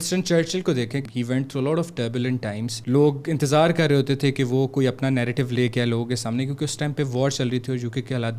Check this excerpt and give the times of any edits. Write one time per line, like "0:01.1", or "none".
0:01.1
0:02.7